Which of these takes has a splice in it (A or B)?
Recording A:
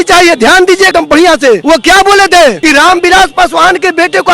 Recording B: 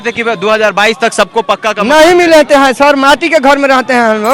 A